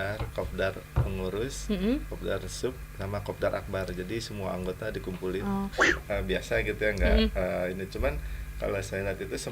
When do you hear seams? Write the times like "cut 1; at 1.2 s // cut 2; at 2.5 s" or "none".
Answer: cut 1; at 5.9 s